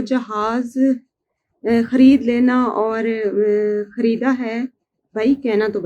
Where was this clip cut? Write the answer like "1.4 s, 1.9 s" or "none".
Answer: none